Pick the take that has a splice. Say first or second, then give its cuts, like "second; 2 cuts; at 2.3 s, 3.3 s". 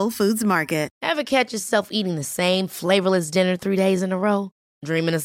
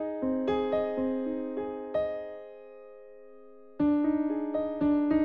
first; 1 cut; at 1.0 s